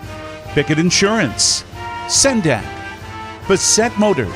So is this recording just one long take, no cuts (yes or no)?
no